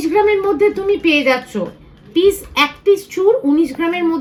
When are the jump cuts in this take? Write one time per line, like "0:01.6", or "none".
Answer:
none